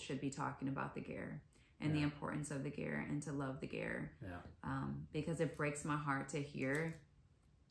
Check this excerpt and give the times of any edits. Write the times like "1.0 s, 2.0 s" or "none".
none